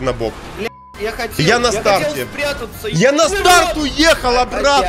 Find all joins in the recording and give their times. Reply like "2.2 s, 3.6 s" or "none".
none